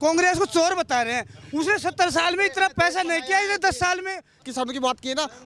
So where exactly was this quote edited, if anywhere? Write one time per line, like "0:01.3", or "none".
0:04.4